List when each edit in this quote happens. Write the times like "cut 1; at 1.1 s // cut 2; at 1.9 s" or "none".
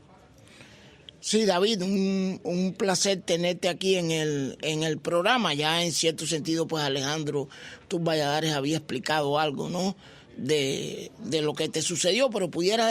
cut 1; at 5.0 s